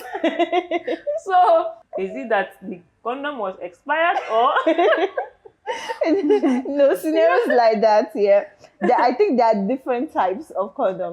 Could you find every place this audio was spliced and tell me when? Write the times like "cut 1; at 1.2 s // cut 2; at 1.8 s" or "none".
cut 1; at 1.8 s